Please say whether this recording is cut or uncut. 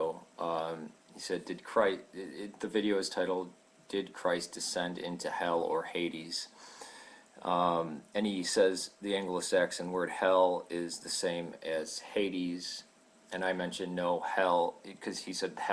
uncut